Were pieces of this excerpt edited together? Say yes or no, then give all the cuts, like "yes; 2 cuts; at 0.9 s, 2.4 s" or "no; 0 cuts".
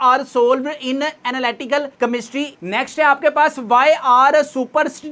no; 0 cuts